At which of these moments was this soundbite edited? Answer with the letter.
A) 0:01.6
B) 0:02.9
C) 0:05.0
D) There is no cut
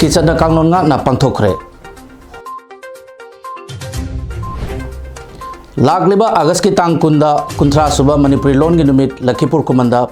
A